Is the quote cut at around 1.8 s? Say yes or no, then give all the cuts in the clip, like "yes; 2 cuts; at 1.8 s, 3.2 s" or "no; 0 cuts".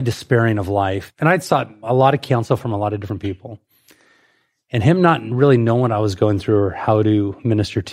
yes; 2 cuts; at 1.1 s, 1.8 s